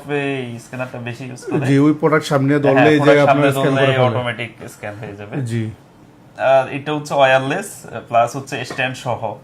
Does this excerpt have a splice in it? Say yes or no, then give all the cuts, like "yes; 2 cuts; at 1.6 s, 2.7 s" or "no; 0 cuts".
no; 0 cuts